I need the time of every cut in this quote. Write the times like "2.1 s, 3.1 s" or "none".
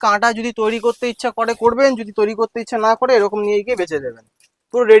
none